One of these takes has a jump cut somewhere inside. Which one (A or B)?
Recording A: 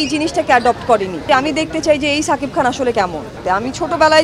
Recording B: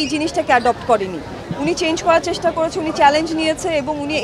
A